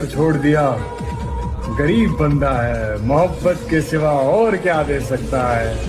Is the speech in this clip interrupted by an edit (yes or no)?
no